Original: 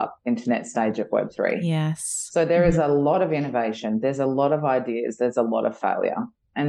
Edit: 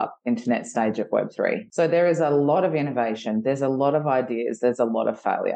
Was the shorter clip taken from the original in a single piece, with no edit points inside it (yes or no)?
no